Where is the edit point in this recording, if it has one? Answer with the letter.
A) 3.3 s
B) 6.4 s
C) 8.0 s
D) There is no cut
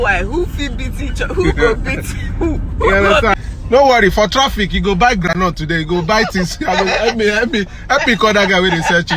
A